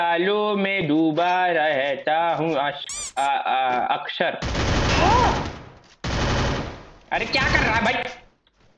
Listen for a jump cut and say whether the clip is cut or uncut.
uncut